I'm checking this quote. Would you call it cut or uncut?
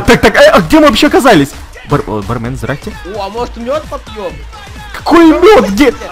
cut